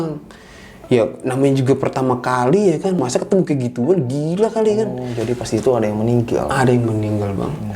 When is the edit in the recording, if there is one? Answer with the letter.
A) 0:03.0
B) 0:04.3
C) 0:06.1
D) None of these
A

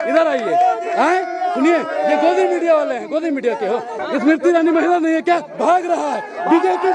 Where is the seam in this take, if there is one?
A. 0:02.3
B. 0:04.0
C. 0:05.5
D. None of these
B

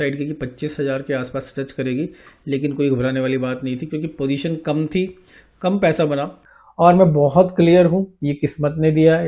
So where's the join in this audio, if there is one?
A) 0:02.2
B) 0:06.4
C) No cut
B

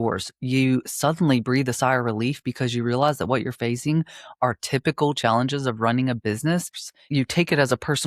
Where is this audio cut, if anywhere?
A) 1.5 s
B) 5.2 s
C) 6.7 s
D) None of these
C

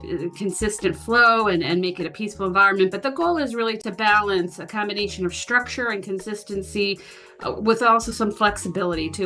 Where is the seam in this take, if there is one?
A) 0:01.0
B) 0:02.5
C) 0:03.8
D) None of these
C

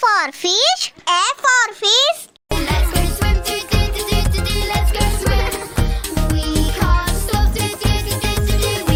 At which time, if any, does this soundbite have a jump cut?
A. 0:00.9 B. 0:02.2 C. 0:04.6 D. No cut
D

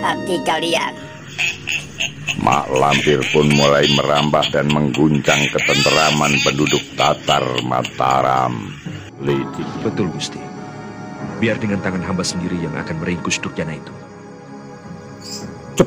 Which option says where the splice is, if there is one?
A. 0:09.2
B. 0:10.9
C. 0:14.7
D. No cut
A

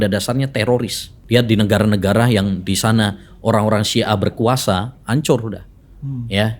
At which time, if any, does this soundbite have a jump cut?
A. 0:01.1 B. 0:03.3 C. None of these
A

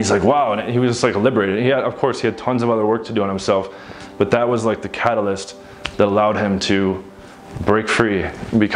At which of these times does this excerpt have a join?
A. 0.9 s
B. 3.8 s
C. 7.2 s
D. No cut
D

